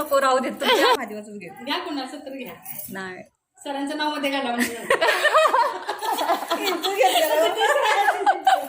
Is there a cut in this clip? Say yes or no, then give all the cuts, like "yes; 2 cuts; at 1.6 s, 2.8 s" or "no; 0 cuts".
no; 0 cuts